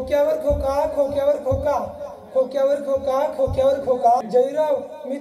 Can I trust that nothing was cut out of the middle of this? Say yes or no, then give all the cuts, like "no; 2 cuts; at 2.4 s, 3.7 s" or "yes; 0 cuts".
no; 1 cut; at 4.3 s